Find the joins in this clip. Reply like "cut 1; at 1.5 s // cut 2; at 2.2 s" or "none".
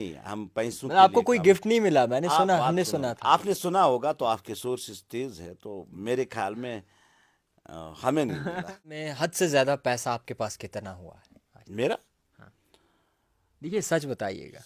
cut 1; at 9.0 s

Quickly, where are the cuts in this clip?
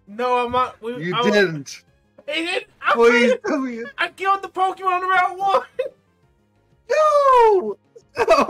cut 1; at 3.9 s

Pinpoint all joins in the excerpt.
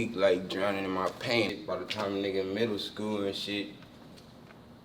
cut 1; at 1.5 s

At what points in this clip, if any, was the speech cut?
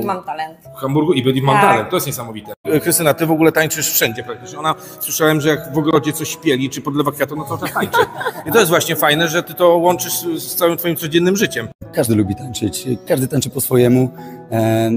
cut 1; at 2.6 s // cut 2; at 11.9 s

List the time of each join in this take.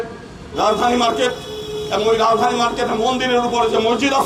none

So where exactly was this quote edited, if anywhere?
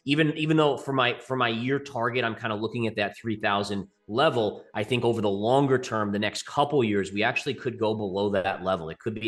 none

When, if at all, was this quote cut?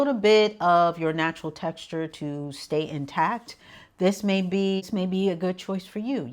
cut 1; at 4.9 s

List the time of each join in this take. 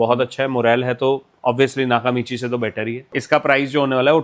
cut 1; at 3.1 s

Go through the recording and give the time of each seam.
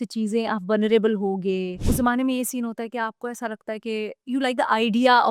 cut 1; at 1.8 s

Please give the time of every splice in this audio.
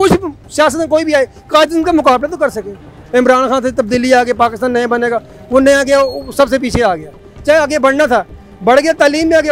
cut 1; at 2.9 s

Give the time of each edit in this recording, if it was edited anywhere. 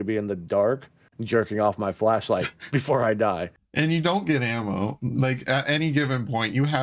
cut 1; at 3.6 s

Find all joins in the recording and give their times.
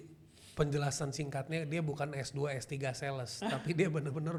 none

